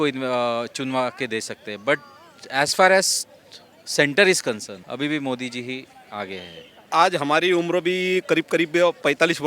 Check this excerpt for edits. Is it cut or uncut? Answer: cut